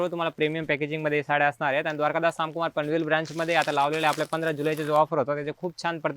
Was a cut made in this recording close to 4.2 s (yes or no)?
no